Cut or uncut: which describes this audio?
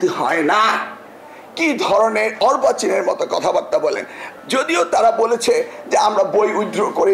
cut